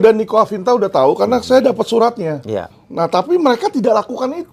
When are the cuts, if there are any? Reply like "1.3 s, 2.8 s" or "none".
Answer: 2.8 s